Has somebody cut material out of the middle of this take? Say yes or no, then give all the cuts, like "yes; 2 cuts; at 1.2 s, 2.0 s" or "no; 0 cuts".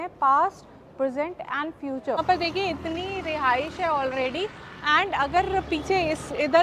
yes; 1 cut; at 2.2 s